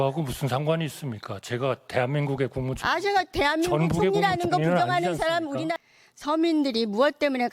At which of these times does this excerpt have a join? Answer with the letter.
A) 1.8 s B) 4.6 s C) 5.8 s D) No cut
C